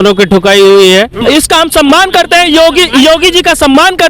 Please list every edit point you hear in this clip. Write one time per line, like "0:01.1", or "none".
0:01.2